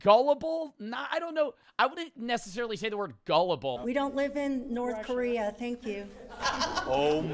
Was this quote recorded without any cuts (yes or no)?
yes